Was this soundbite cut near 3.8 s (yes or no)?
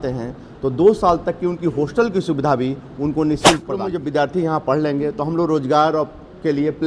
yes